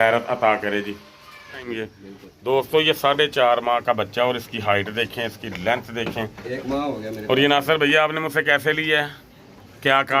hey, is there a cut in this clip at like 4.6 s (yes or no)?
no